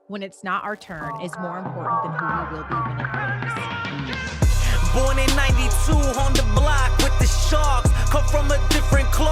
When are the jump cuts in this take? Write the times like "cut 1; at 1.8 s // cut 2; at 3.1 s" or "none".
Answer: cut 1; at 1.8 s